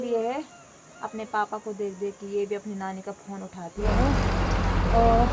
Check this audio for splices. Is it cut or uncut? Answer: cut